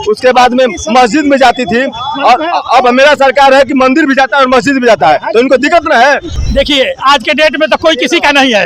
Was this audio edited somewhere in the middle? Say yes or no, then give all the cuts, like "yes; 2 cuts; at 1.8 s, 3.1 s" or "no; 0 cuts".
yes; 1 cut; at 6.4 s